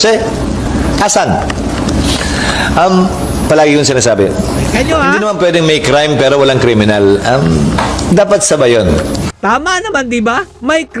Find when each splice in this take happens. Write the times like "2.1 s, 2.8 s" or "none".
none